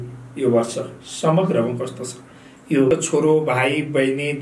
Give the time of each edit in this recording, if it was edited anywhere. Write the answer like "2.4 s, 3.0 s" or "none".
2.9 s